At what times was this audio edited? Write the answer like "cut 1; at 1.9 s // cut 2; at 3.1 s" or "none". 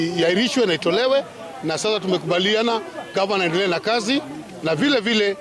none